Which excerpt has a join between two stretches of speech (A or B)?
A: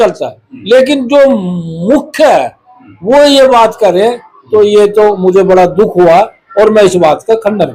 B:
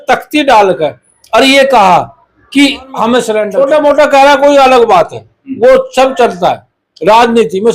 B